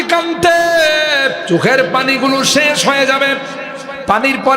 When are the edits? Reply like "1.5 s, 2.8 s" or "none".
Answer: 1.4 s

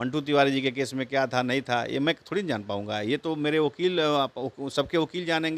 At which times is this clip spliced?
none

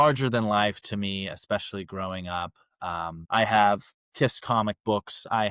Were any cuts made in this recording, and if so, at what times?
3.2 s

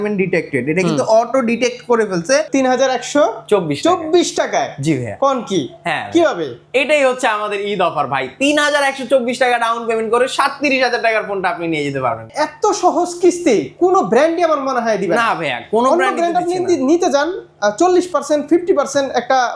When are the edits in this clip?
2.5 s, 12.3 s

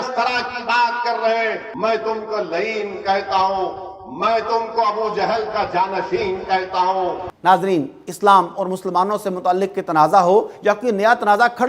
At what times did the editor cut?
1.7 s

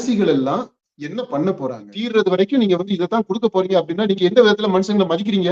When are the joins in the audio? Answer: 1.9 s

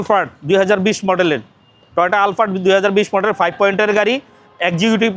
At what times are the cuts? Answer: none

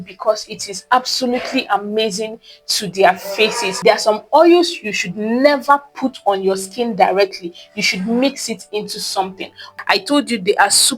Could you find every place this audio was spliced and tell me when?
3.7 s, 9.7 s

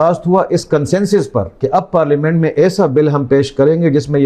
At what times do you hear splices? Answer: 1.5 s

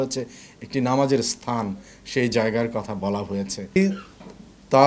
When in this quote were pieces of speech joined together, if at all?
3.8 s

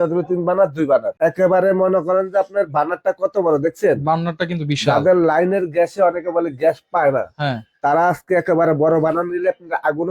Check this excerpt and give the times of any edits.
1.1 s

